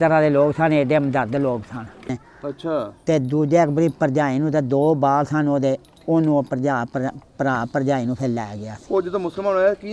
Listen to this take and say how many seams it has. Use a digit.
1